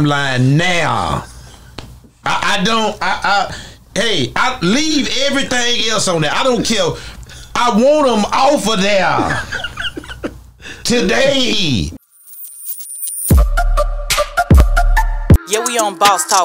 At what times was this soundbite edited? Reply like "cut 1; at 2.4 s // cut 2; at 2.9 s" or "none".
cut 1; at 11.9 s